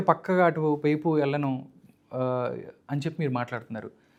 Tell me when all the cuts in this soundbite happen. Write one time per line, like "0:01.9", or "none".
none